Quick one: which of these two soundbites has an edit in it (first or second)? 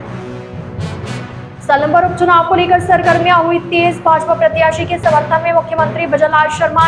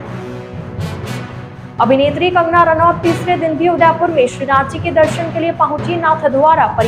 first